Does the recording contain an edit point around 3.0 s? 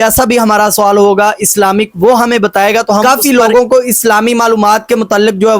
yes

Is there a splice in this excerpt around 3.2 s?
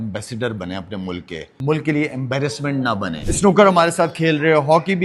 yes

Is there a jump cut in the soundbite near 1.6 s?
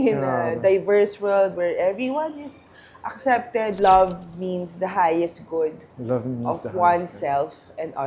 no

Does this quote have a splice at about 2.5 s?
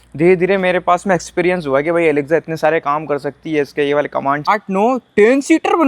no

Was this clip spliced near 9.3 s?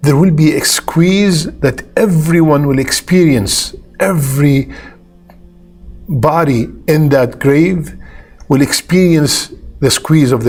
no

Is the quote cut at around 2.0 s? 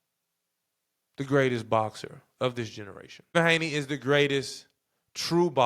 no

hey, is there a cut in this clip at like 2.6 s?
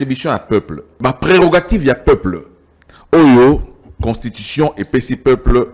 no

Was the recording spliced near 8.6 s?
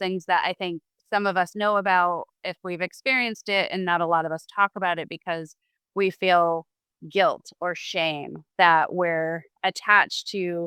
no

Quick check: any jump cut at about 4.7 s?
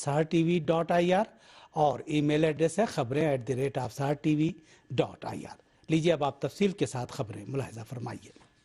yes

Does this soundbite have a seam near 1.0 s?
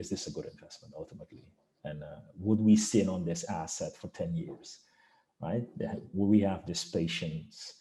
no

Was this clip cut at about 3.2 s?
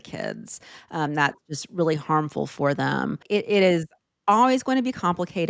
yes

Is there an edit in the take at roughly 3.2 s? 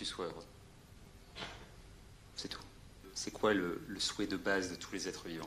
yes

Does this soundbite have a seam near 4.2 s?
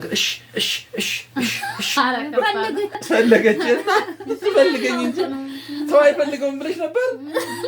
no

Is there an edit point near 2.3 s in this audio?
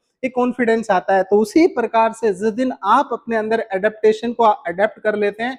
no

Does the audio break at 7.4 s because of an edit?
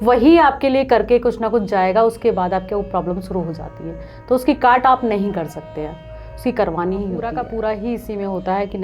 yes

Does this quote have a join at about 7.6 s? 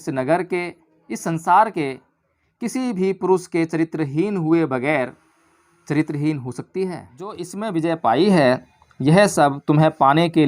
yes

